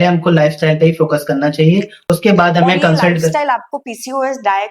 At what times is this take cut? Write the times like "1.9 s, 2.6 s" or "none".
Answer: 2.0 s